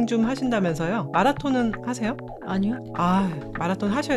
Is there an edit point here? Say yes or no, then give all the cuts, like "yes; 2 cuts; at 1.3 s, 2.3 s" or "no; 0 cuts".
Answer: yes; 2 cuts; at 1.0 s, 2.5 s